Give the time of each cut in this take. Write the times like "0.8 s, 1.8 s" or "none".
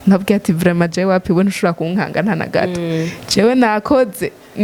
none